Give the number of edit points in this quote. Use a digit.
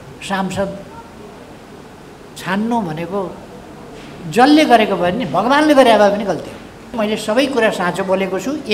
1